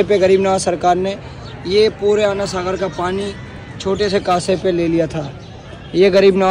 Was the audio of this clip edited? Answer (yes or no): no